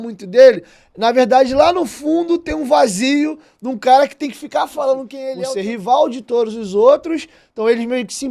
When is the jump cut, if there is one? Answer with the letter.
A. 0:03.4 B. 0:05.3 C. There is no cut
B